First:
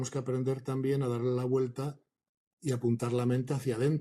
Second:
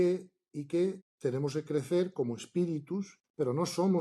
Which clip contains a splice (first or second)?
second